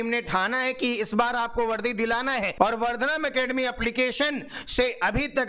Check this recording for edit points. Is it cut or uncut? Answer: cut